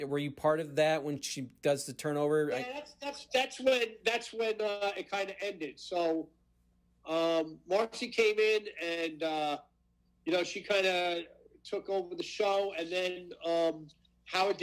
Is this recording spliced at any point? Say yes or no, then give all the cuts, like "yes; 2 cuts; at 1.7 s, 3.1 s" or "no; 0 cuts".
no; 0 cuts